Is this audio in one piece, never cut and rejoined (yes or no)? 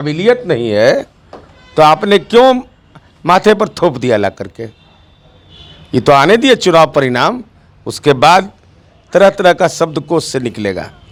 yes